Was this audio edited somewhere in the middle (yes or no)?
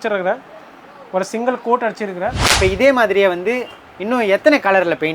yes